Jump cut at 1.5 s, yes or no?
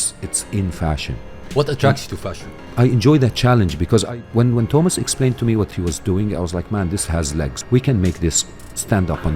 yes